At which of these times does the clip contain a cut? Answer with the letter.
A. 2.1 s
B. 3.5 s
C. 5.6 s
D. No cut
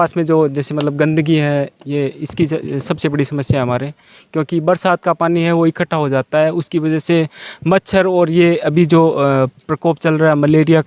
D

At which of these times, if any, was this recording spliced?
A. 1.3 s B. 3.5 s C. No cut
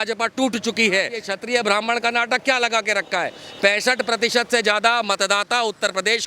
A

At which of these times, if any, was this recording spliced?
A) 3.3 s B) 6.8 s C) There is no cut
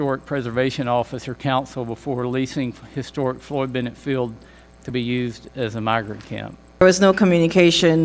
B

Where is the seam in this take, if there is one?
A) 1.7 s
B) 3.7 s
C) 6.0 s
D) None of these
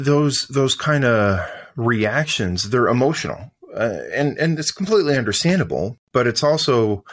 C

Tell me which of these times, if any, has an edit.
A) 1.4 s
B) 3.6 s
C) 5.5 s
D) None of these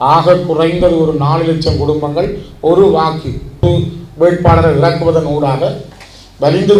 B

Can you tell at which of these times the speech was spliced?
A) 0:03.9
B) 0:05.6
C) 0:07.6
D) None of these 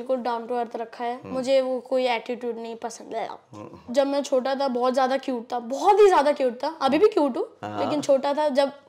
A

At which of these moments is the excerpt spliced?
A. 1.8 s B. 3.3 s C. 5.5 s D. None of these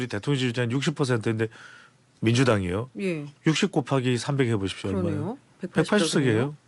D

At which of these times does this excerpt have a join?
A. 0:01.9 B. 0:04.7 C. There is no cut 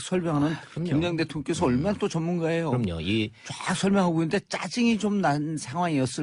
A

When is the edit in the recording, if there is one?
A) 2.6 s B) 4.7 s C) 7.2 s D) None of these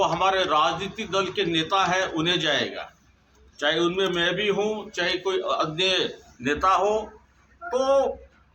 C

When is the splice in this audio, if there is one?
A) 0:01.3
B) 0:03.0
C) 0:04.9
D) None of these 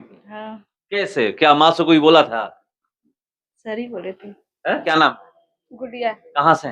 C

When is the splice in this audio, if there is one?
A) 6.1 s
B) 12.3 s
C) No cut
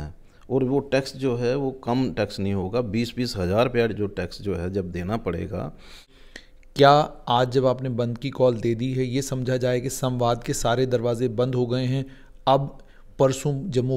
A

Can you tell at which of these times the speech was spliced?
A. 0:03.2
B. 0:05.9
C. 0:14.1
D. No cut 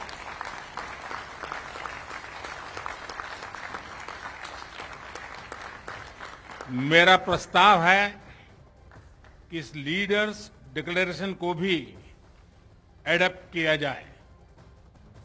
C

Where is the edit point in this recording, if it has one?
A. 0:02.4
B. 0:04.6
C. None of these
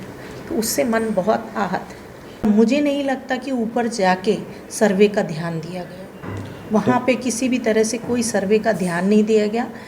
A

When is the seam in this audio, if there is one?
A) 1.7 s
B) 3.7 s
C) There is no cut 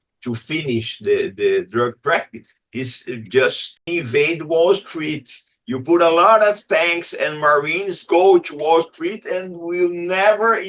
B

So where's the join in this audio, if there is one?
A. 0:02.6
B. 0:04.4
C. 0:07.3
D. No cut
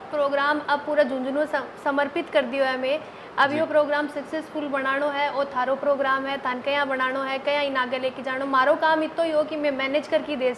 D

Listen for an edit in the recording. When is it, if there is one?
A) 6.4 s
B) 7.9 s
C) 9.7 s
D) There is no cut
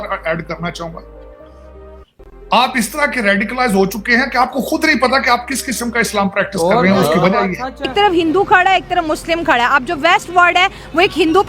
B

